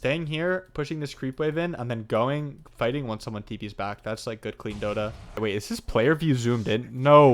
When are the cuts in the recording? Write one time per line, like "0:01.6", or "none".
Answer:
0:05.2